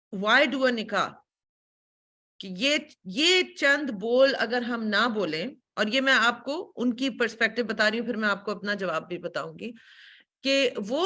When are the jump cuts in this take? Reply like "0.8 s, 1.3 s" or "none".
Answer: none